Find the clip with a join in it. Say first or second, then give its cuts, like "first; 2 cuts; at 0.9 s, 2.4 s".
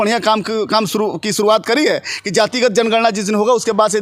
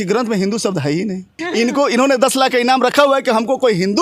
second; 1 cut; at 1.4 s